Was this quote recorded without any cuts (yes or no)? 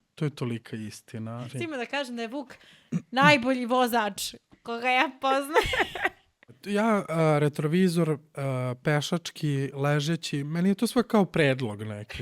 no